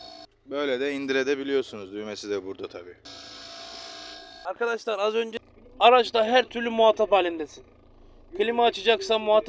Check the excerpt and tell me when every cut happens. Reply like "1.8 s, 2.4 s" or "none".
5.3 s

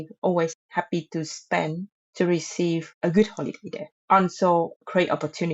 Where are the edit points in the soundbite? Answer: 2.9 s, 3.9 s, 4.8 s

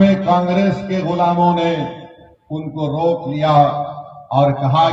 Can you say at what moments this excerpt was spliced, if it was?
none

